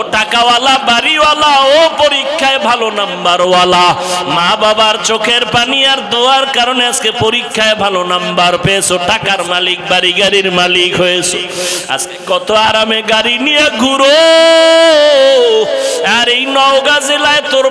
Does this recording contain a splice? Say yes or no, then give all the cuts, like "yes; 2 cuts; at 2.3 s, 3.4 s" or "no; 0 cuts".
no; 0 cuts